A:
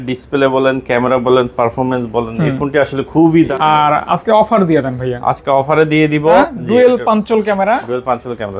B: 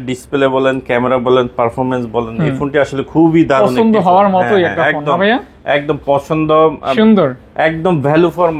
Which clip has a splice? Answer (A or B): A